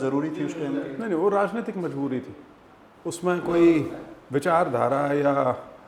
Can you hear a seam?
no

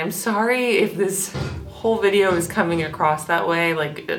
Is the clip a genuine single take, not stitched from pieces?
yes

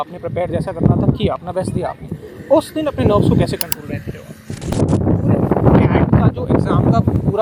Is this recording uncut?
no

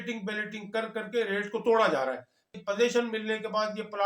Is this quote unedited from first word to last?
no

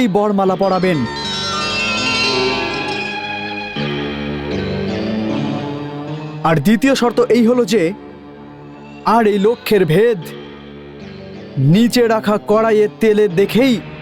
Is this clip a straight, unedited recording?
no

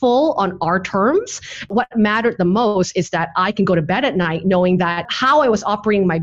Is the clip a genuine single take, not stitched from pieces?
no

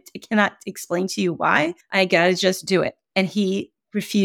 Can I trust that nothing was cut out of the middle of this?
no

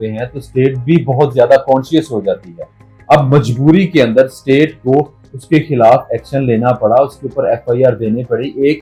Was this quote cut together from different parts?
no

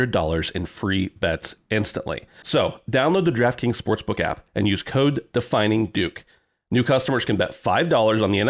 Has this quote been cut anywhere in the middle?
yes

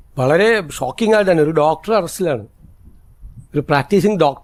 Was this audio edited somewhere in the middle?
no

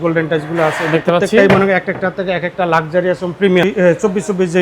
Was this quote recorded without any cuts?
no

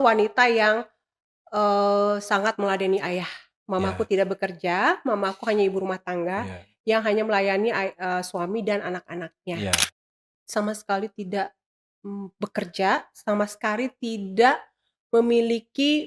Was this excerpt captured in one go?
no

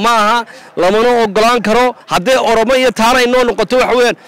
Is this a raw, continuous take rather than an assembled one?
no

